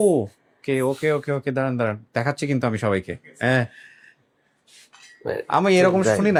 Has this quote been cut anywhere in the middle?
no; 0 cuts

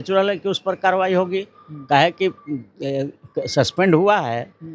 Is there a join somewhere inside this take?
no; 0 cuts

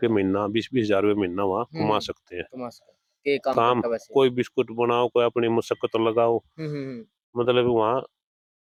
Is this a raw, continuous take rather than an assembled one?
yes; 0 cuts

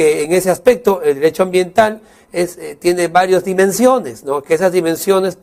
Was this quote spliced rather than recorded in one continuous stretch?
no; 0 cuts

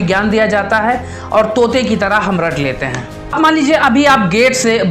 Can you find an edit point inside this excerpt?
yes; 1 cut; at 3.3 s

